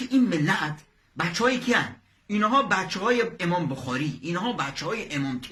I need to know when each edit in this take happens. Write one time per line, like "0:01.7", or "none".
none